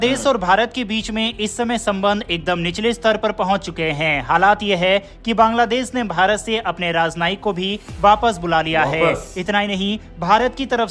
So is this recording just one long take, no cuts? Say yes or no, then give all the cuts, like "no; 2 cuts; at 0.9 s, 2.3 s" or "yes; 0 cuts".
yes; 0 cuts